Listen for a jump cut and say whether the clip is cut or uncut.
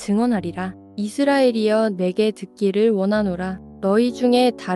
cut